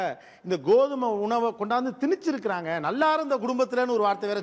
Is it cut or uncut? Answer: uncut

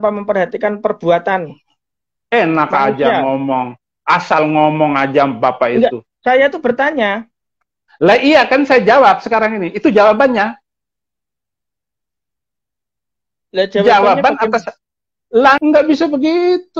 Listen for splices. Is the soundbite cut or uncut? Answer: cut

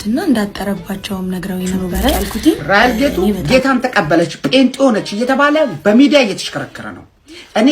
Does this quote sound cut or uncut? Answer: cut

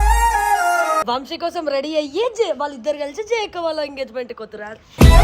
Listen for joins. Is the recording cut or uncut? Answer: cut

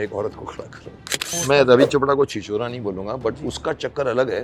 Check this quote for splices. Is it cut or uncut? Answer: cut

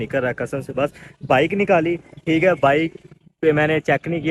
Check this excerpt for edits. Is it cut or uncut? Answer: uncut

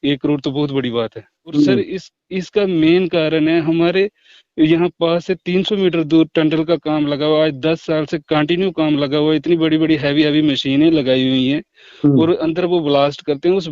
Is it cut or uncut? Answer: cut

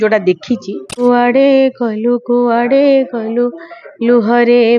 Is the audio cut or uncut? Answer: cut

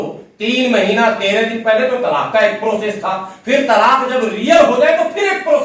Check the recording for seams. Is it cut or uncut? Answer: uncut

